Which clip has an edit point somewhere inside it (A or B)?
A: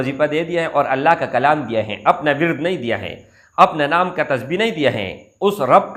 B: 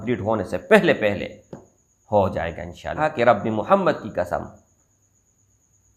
B